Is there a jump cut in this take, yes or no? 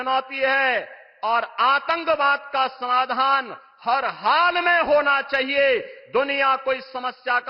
no